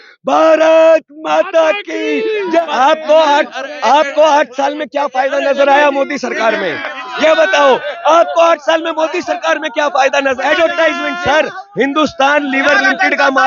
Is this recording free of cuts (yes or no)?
no